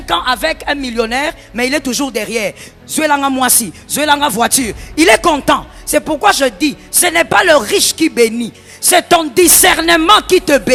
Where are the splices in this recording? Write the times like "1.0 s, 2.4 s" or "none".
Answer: none